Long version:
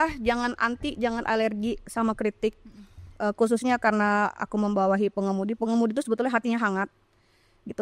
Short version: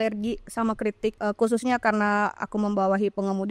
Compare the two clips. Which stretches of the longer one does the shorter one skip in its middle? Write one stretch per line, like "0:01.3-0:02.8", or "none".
0:02.6-0:03.2